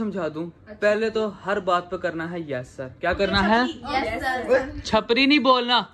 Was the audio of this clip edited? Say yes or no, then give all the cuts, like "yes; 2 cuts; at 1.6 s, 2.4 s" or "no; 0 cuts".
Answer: no; 0 cuts